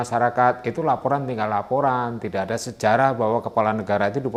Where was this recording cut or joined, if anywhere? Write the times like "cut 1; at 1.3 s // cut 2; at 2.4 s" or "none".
none